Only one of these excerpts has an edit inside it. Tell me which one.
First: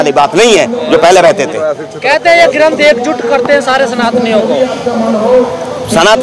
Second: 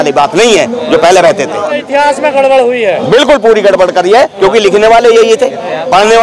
second; 1 cut; at 1.8 s

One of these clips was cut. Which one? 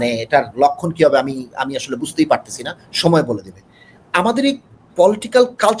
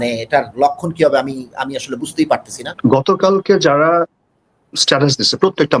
second; 1 cut; at 2.6 s

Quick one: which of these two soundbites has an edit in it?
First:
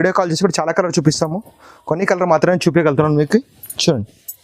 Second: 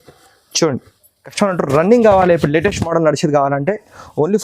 second; 1 cut; at 1.3 s

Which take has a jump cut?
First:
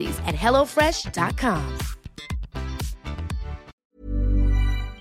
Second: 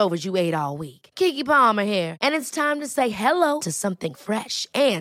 first; 1 cut; at 3.8 s

